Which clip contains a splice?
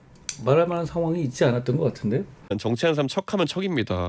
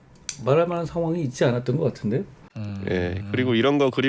first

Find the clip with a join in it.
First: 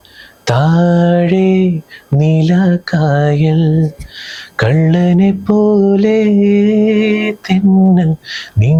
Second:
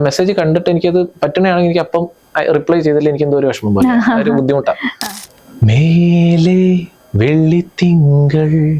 second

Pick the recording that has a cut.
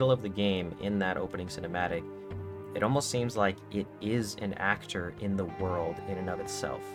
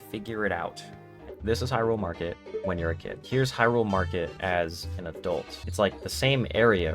second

